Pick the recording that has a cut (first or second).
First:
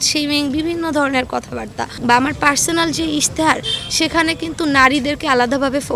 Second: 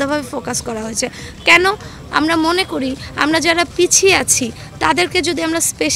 first